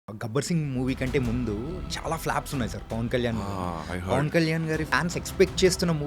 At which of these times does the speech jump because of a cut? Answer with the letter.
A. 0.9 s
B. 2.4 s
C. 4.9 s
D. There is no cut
C